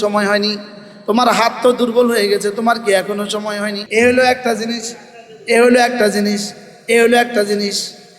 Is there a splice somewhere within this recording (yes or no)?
yes